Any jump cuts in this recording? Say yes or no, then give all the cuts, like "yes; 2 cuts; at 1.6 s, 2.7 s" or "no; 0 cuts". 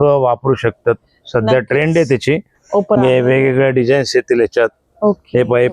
yes; 1 cut; at 3.0 s